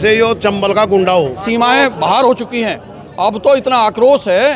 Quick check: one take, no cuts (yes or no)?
no